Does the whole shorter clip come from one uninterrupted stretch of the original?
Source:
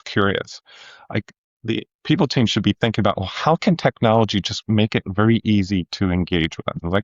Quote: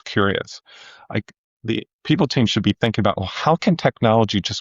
yes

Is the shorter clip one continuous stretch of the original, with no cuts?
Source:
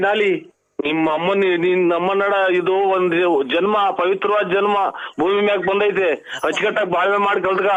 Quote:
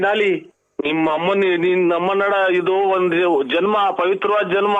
yes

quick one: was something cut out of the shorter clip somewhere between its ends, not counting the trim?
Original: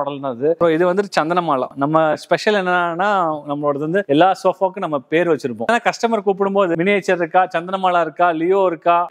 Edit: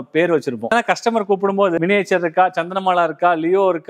no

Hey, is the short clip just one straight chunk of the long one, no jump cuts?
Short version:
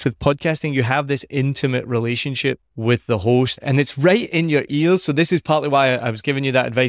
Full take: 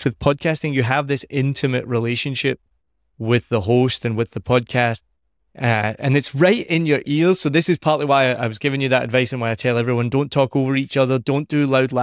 no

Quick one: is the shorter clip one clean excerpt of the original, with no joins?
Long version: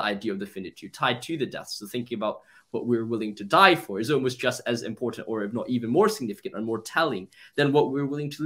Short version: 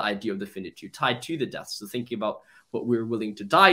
yes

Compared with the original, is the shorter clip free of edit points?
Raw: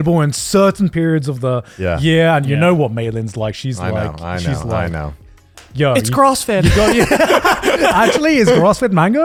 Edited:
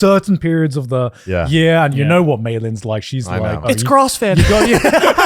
no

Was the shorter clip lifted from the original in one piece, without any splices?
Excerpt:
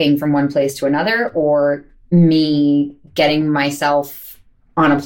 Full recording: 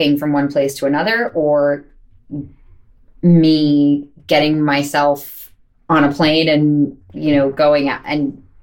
no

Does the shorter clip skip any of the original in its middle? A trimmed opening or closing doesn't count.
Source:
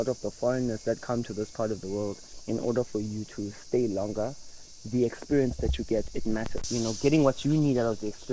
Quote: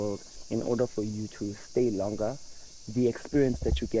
no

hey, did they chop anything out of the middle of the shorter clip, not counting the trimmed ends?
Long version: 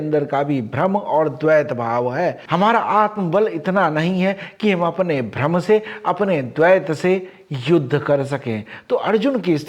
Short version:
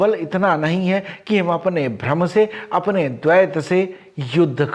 no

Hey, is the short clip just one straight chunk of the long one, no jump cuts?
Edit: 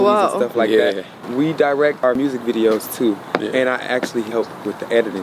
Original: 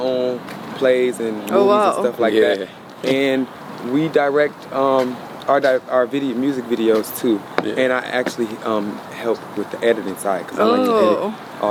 no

